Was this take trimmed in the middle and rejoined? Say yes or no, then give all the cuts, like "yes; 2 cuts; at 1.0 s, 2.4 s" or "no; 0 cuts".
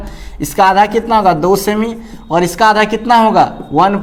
no; 0 cuts